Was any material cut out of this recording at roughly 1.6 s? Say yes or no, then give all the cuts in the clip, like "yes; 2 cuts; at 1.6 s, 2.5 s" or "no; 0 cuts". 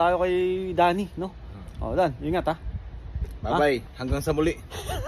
no; 0 cuts